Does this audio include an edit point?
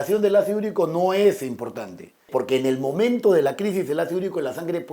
yes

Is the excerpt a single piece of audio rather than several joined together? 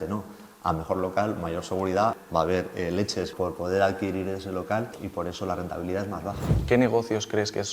no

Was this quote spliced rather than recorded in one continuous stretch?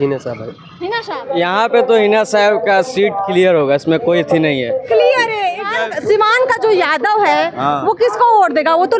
yes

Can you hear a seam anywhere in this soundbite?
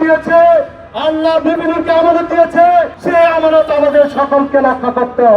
yes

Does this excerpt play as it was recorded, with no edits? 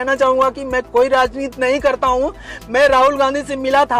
yes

